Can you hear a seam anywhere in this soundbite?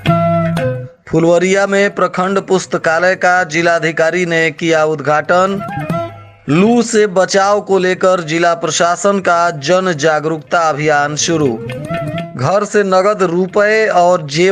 yes; 1 cut; at 0.9 s

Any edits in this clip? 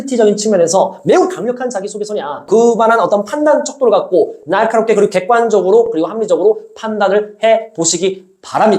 yes; 1 cut; at 2.4 s

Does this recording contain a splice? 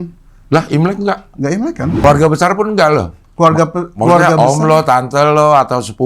yes; 1 cut; at 2.0 s

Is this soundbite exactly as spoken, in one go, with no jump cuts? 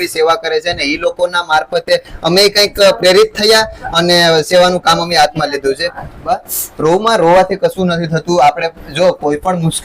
no; 1 cut; at 6.2 s

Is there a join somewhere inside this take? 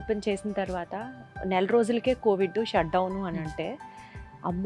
no; 0 cuts

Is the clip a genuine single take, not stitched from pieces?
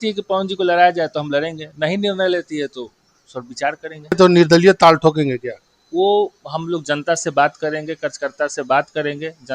no; 1 cut; at 4.1 s

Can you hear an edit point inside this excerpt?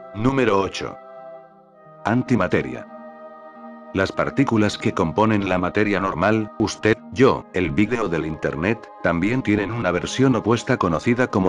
yes; 1 cut; at 3.8 s

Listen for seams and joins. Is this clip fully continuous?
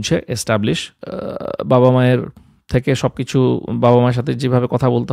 no; 1 cut; at 0.9 s

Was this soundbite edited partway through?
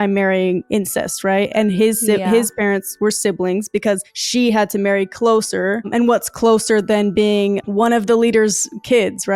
no; 0 cuts

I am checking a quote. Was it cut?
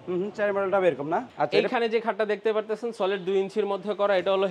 yes; 1 cut; at 1.3 s

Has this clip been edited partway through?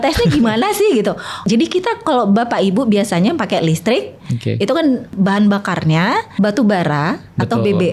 yes; 3 cuts; at 1.4 s, 5.1 s, 6.3 s

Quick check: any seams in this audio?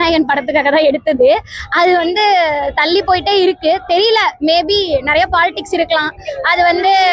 no; 0 cuts

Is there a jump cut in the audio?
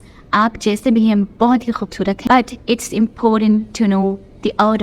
yes; 1 cut; at 2.2 s

